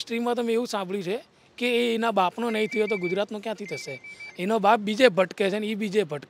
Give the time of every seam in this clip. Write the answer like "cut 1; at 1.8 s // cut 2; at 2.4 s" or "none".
none